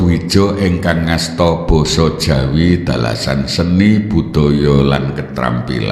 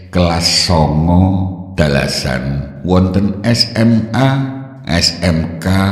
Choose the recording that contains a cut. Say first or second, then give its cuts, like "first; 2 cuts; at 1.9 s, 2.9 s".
second; 3 cuts; at 1.6 s, 2.7 s, 3.9 s